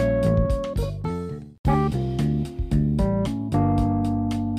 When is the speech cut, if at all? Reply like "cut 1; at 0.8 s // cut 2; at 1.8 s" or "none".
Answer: cut 1; at 1.5 s